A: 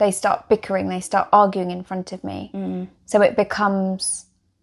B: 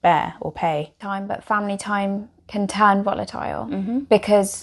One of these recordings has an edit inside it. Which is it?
B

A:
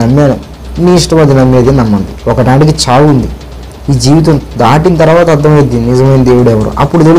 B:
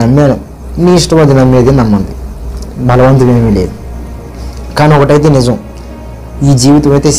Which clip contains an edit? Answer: A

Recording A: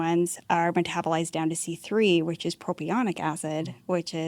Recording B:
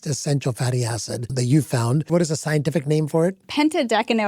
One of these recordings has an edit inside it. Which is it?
B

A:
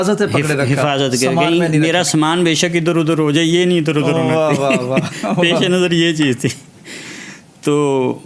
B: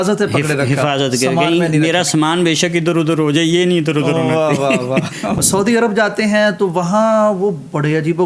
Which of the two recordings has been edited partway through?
B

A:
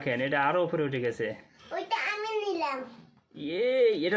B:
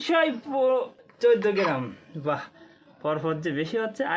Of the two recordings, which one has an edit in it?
B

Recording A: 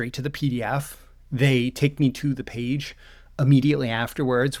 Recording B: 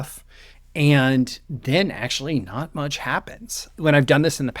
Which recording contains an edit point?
B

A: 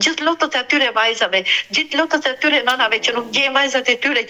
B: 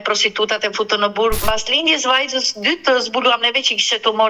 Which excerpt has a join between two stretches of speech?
B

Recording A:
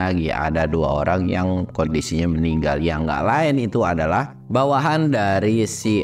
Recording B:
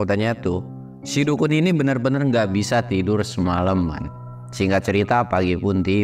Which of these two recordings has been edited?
A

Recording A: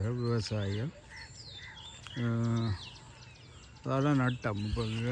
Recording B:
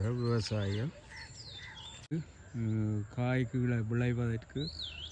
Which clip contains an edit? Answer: B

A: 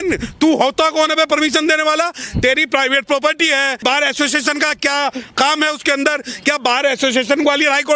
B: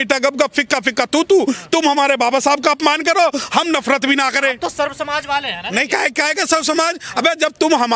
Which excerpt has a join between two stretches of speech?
A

